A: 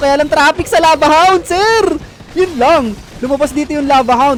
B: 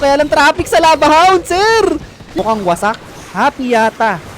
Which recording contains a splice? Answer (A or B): B